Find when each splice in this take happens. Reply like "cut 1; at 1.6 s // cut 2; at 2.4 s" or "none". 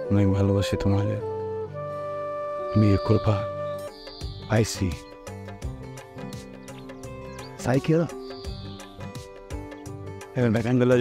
cut 1; at 3.8 s